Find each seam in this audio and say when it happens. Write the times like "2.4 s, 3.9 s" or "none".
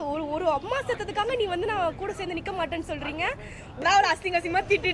3.8 s